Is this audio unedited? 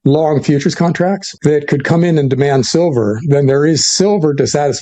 no; 1 cut; at 1.3 s

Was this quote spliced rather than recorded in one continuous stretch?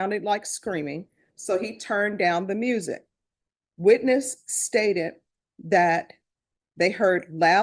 no; 0 cuts

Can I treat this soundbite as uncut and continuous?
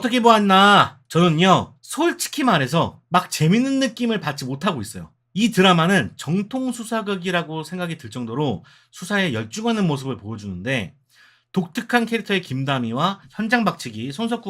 no; 3 cuts; at 1.0 s, 1.8 s, 3.0 s

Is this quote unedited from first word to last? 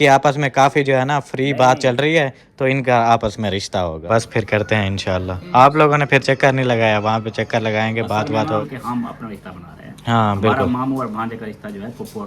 no; 2 cuts; at 4.0 s, 8.6 s

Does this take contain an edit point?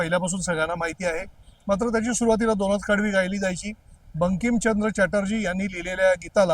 no; 0 cuts

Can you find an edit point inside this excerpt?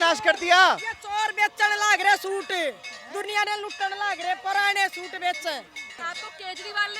yes; 1 cut; at 6.1 s

